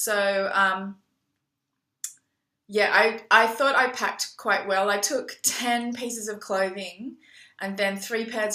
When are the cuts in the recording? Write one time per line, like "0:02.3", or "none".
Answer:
0:04.3

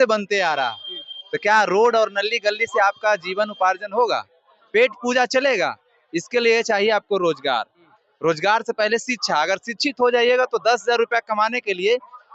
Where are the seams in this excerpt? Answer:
none

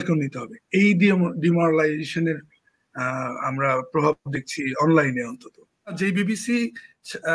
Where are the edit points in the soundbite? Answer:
0:06.0

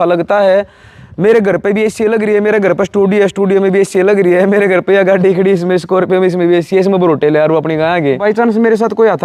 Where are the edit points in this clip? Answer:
0:08.2

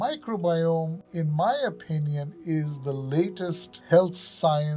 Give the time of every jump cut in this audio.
0:01.0
0:03.7

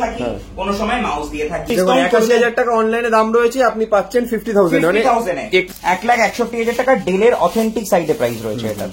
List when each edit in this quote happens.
0:01.7
0:05.7

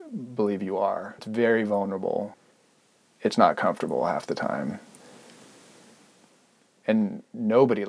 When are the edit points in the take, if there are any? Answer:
0:01.2
0:02.4

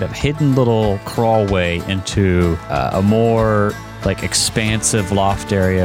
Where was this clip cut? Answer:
0:01.0
0:02.6
0:03.9

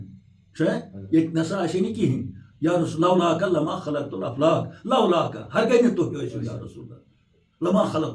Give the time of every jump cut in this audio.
none

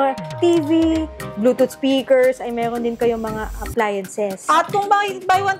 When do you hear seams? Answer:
0:04.4

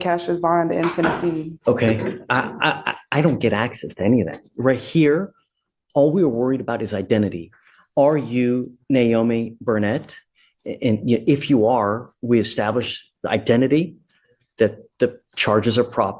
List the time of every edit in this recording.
0:01.5

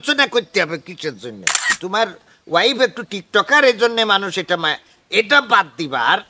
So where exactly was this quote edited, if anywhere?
0:01.6

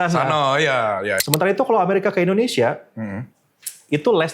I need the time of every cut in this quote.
0:01.2

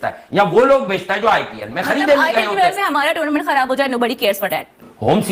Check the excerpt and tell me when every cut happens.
none

